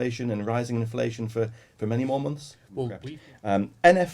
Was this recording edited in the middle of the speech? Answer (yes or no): yes